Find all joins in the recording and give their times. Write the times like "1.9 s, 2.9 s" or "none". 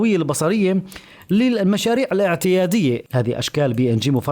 3.0 s